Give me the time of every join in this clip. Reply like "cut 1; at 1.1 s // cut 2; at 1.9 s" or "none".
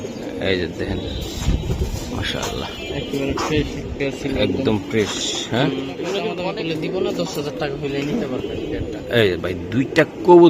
cut 1; at 6.3 s